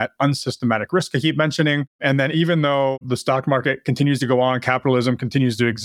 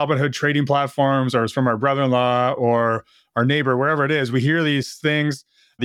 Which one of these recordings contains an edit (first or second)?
first